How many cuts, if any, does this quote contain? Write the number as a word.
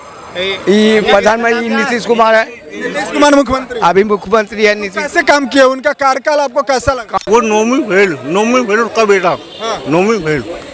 one